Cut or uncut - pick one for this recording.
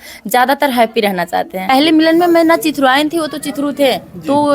cut